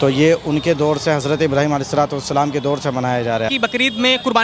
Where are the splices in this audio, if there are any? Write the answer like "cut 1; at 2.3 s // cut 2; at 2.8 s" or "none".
cut 1; at 3.5 s